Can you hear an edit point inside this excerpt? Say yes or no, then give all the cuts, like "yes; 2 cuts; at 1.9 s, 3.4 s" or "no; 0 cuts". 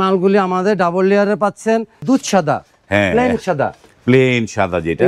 yes; 1 cut; at 2.0 s